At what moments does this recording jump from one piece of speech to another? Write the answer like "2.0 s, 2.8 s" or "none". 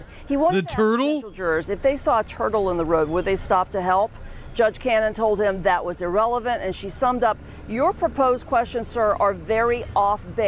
none